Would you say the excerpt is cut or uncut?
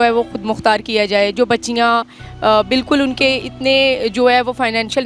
uncut